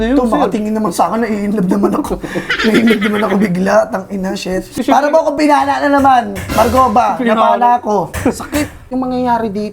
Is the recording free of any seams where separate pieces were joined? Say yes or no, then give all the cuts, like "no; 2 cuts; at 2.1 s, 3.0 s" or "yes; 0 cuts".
no; 2 cuts; at 4.7 s, 8.8 s